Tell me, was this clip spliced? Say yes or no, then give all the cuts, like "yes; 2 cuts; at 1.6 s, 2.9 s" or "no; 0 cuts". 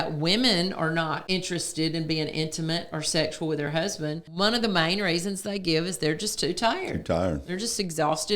yes; 2 cuts; at 1.2 s, 4.2 s